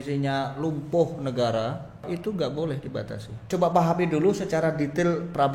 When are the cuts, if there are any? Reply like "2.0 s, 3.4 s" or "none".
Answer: 2.1 s, 3.5 s